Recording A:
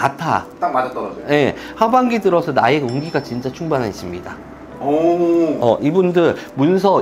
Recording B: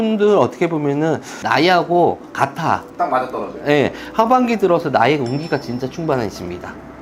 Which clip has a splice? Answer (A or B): B